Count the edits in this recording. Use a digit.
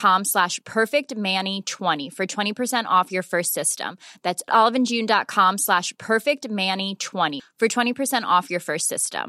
1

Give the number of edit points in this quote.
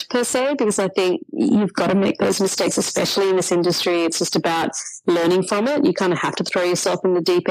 0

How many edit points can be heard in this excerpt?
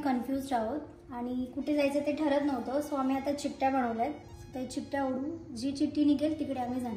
0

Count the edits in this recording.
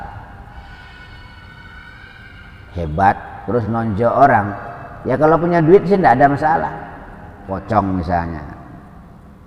1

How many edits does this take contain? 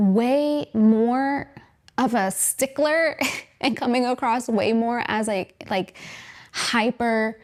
0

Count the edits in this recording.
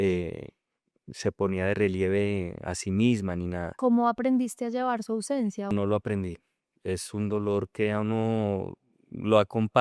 2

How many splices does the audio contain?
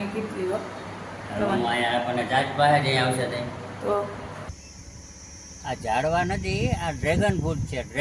1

